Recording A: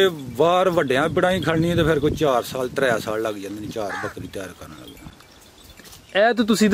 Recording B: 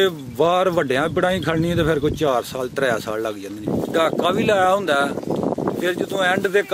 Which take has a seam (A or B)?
B